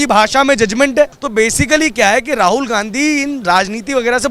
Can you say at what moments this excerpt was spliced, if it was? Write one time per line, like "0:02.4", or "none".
0:01.2